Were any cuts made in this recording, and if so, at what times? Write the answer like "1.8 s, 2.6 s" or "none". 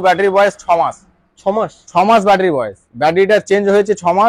none